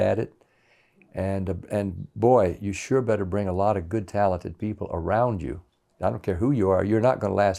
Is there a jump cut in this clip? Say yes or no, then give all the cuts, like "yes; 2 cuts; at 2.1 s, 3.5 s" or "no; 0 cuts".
no; 0 cuts